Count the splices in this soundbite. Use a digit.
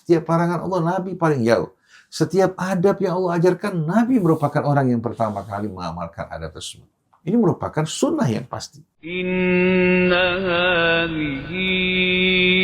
1